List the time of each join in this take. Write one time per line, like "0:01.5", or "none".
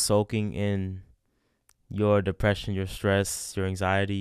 none